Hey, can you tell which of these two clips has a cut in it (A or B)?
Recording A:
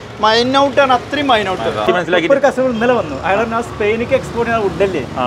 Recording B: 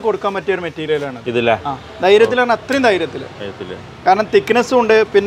A